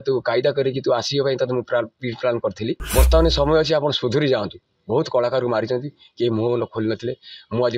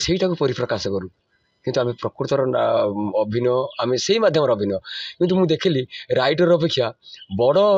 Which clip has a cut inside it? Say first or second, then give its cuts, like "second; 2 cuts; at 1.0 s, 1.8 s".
first; 1 cut; at 2.8 s